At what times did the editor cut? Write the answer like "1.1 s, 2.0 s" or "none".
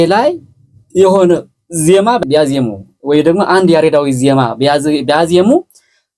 2.2 s